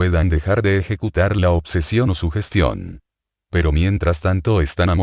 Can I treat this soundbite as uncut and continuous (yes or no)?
no